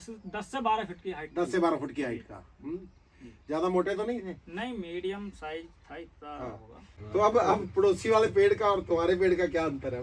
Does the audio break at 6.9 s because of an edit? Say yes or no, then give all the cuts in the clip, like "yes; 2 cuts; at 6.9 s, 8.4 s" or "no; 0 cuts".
yes; 1 cut; at 6.9 s